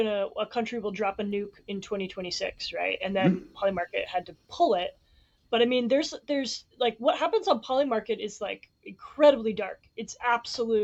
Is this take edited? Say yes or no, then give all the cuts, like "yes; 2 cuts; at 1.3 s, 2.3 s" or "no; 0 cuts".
no; 0 cuts